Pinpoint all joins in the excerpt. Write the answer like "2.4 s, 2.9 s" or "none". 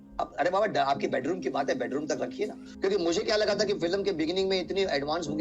2.7 s